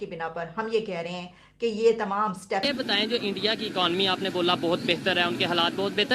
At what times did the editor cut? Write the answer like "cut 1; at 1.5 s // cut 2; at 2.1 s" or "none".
cut 1; at 2.7 s